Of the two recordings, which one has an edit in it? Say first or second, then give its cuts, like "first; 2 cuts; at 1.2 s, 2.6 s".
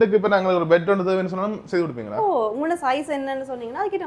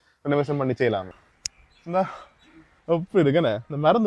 second; 1 cut; at 1.1 s